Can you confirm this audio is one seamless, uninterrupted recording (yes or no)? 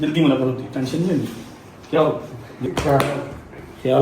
no